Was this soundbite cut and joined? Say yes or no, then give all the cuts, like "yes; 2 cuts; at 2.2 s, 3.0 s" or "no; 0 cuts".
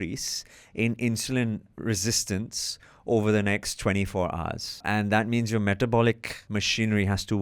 yes; 2 cuts; at 4.8 s, 6.3 s